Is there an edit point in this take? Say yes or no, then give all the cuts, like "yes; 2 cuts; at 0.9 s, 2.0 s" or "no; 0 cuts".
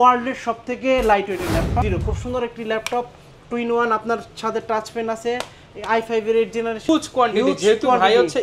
yes; 2 cuts; at 1.8 s, 6.9 s